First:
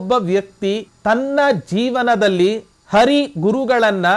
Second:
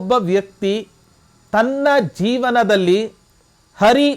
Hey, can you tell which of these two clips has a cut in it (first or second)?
first